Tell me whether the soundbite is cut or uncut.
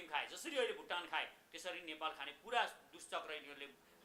uncut